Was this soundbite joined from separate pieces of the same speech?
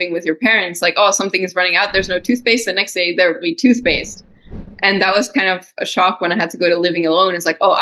no; 0 cuts

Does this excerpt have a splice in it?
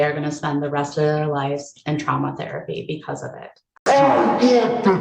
yes; 1 cut; at 3.7 s

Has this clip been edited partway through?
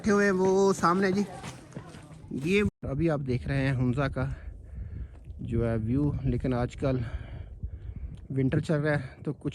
yes; 1 cut; at 2.7 s

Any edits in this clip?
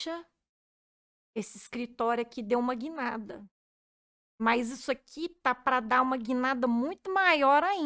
no; 0 cuts

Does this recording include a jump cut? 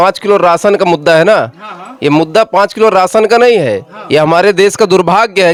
no; 0 cuts

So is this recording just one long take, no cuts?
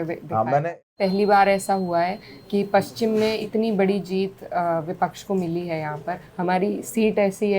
no; 3 cuts; at 0.9 s, 3.4 s, 6.2 s

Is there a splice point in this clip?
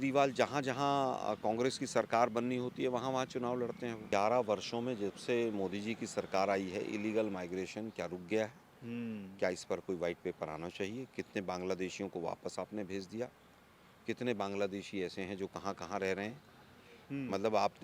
yes; 1 cut; at 4.0 s

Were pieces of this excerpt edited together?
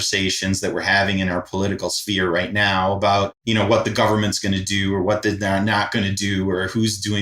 yes; 1 cut; at 3.4 s

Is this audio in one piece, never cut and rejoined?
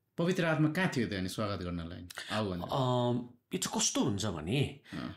yes; 0 cuts

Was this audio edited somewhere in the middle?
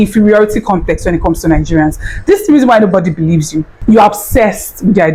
no; 0 cuts

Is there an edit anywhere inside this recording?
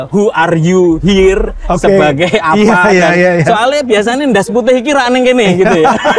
no; 0 cuts

